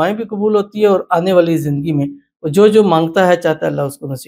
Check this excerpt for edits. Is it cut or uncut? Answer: uncut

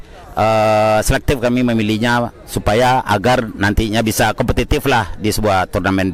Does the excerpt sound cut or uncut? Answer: uncut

